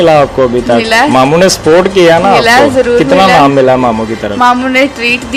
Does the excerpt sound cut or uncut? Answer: uncut